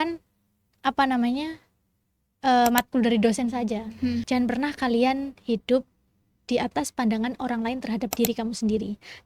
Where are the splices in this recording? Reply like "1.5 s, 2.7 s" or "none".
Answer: 4.2 s